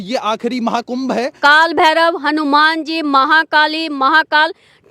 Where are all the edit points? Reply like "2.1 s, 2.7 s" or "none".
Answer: 1.3 s